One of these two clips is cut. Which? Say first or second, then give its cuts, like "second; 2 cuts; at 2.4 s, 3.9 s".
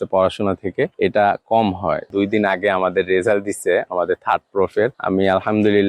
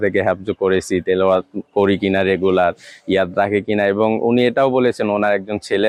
first; 3 cuts; at 0.9 s, 2.1 s, 5.0 s